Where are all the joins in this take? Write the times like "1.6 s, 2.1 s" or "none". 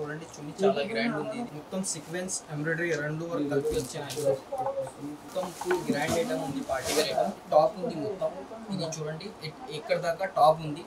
1.5 s, 5.3 s, 7.4 s

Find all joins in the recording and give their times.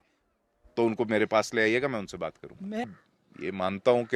2.9 s

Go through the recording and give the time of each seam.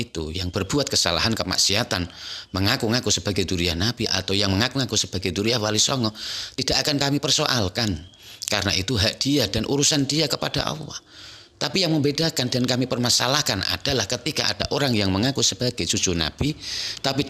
none

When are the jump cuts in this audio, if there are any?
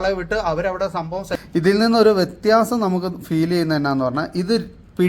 1.4 s

